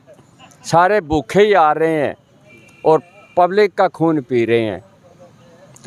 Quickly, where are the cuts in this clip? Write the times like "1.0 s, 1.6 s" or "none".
none